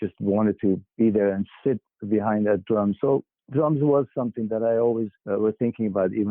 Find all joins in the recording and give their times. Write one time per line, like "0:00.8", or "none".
0:00.9
0:05.2